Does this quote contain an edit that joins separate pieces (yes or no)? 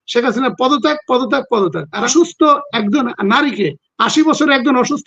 yes